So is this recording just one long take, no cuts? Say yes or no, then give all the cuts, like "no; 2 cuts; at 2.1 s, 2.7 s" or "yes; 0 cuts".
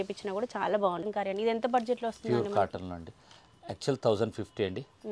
no; 1 cut; at 1.1 s